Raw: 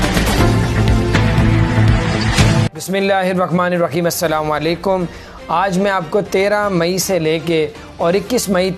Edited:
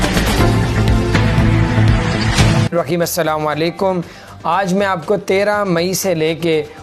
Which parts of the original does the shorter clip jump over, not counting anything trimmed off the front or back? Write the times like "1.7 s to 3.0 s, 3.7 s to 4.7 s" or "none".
2.7 s to 3.8 s